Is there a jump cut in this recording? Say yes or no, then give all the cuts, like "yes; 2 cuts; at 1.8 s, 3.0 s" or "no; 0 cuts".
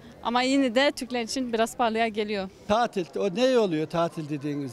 yes; 1 cut; at 2.6 s